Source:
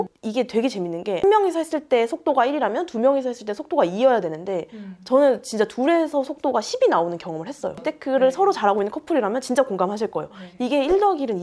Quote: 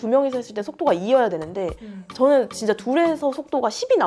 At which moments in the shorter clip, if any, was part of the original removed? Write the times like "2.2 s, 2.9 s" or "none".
none